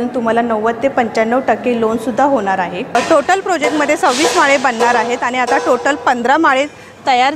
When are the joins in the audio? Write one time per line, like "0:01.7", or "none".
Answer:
0:02.9